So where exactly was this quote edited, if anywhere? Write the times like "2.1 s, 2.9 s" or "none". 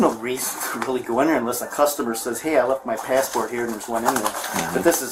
none